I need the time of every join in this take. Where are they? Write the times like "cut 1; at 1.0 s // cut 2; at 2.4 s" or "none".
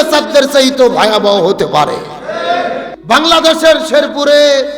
cut 1; at 2.9 s